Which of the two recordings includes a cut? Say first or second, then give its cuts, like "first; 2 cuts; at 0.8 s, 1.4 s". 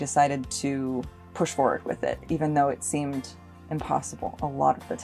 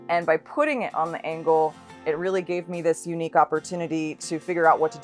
first; 1 cut; at 1.2 s